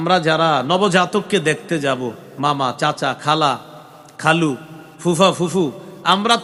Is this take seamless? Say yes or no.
yes